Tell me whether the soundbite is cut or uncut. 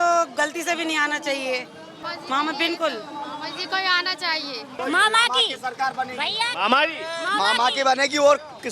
cut